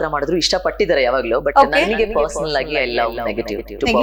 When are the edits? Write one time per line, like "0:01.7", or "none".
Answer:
none